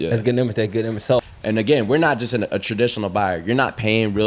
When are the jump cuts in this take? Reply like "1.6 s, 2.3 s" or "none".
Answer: 1.2 s